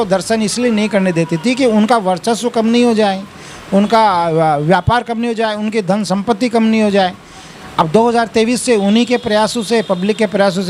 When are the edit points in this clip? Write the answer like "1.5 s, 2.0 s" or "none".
none

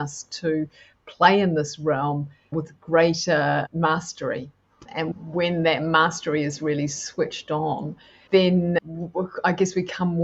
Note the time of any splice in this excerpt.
5.1 s

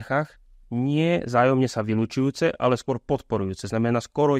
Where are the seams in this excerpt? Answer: none

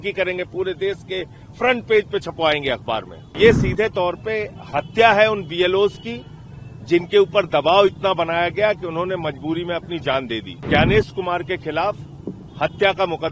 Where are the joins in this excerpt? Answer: 3.4 s, 10.7 s

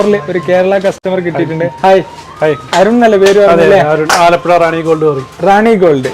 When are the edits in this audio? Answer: 1.0 s

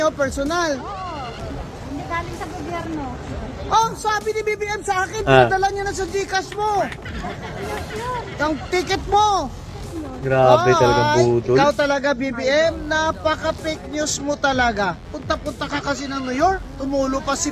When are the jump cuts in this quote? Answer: 15.1 s

